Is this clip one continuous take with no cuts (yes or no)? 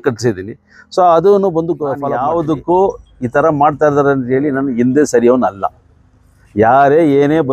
no